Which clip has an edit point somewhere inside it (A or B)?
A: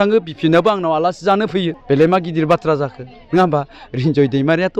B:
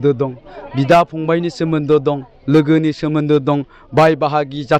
A